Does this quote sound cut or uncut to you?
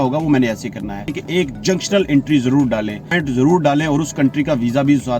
cut